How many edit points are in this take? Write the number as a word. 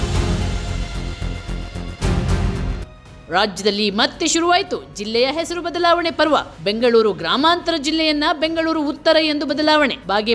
one